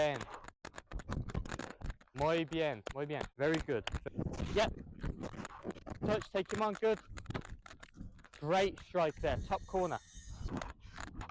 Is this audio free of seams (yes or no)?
no